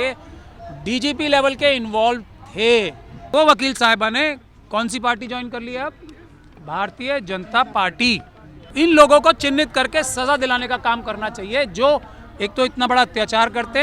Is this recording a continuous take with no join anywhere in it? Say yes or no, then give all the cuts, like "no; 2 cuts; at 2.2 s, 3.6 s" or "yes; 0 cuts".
no; 2 cuts; at 3.3 s, 8.7 s